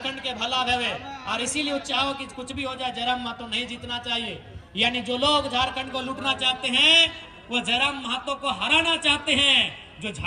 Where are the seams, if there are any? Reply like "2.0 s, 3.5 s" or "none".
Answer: none